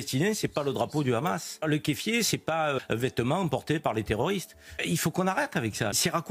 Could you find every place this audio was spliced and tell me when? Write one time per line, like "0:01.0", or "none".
none